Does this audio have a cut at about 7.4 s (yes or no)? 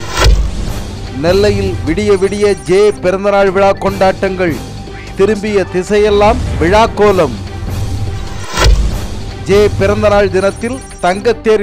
no